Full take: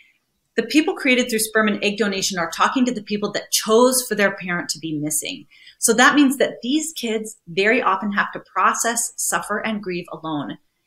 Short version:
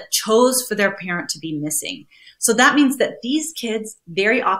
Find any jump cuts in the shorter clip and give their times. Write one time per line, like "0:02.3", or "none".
none

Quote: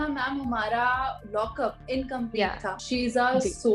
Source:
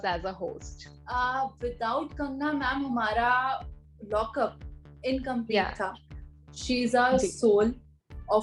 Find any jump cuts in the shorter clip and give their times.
0:01.5
0:02.8

